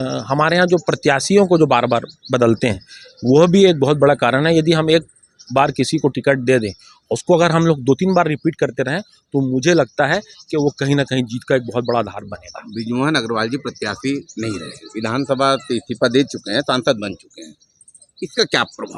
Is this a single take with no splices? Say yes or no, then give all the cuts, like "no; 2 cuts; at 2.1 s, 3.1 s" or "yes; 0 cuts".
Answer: yes; 0 cuts